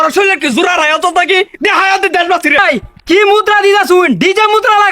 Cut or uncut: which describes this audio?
cut